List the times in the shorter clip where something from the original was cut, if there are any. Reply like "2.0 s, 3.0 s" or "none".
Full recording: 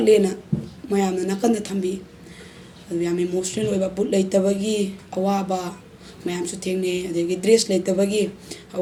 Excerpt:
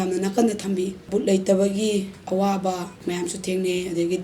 1.1 s, 2.9 s